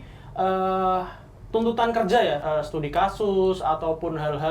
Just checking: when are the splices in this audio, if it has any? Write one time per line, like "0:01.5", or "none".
0:02.4